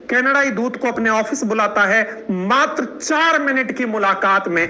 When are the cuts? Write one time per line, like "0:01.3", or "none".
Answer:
none

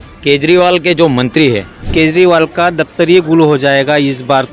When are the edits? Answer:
0:01.8

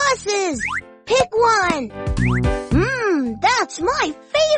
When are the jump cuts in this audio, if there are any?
0:02.0

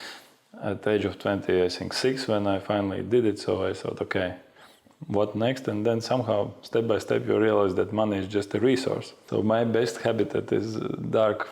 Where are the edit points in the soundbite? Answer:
0:09.1

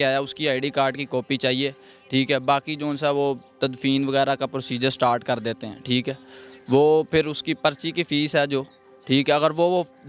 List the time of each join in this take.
none

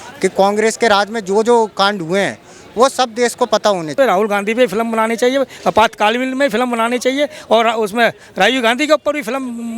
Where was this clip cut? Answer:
0:03.9

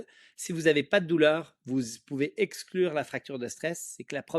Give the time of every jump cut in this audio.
none

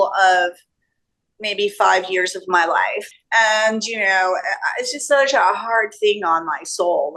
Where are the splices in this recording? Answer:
0:03.0

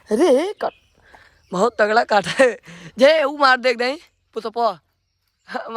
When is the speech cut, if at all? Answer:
none

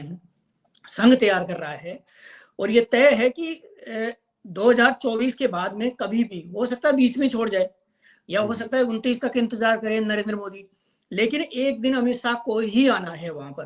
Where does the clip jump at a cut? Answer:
none

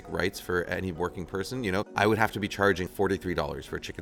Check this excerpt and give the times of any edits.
0:01.9
0:02.9

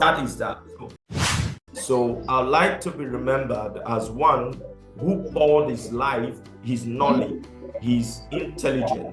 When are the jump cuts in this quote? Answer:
0:01.2

